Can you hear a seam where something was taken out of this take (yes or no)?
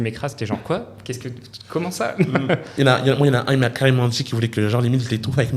no